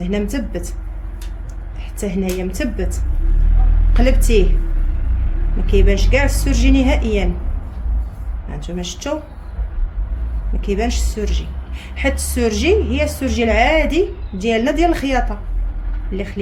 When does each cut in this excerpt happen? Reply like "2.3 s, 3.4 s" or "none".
none